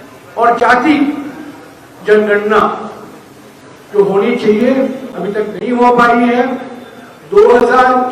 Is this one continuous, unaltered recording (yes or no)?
yes